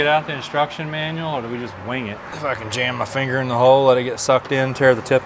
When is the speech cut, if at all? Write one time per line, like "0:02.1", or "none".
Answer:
0:02.3